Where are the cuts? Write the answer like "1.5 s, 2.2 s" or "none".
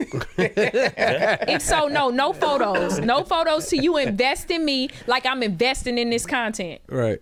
none